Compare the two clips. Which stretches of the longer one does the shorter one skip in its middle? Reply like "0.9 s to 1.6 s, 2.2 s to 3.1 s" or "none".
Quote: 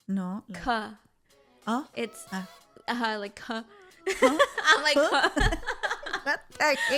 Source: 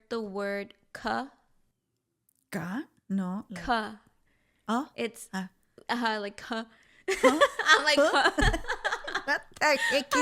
none